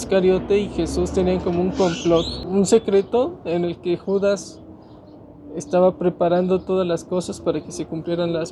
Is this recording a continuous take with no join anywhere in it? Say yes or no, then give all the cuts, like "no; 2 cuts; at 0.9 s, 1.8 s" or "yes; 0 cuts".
yes; 0 cuts